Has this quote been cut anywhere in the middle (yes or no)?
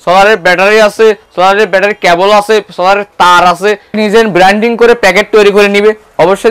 yes